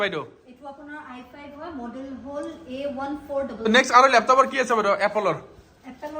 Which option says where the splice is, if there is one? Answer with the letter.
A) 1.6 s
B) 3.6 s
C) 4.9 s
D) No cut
B